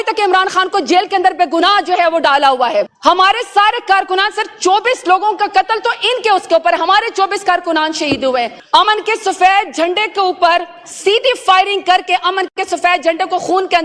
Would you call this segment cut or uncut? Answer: cut